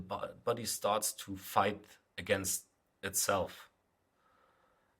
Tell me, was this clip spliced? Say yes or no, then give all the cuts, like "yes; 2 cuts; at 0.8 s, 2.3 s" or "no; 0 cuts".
no; 0 cuts